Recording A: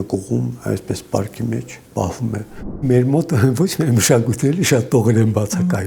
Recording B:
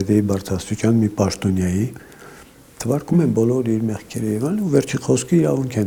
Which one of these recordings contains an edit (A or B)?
A